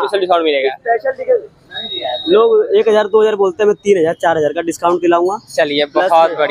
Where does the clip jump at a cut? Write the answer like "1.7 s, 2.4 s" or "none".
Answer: none